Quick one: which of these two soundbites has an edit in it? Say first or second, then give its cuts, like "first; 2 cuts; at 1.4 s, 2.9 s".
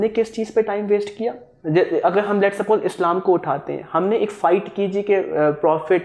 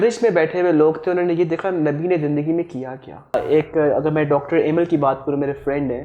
second; 1 cut; at 3.3 s